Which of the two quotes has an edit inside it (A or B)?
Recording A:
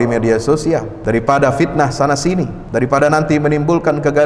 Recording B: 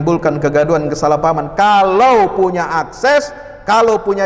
A